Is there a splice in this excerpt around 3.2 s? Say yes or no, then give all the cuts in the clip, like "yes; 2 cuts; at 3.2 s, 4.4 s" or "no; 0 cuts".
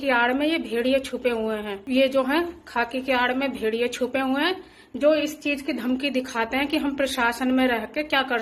no; 1 cut; at 1.8 s